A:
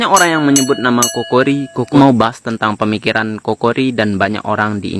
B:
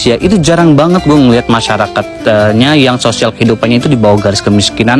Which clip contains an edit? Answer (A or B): A